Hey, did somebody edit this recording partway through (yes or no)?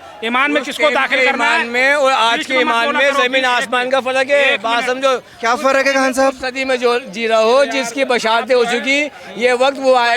no